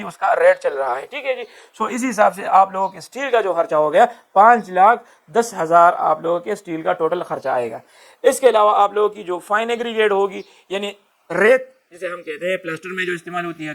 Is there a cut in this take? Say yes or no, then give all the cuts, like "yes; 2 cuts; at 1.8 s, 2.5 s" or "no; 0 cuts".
no; 0 cuts